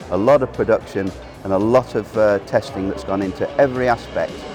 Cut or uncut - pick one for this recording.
uncut